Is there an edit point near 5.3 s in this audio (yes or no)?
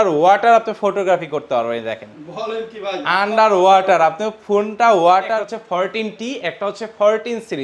yes